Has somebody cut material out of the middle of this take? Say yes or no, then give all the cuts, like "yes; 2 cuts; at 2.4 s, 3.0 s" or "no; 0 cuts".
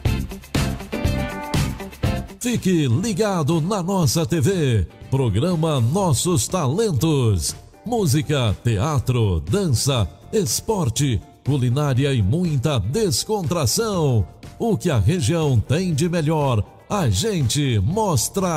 no; 0 cuts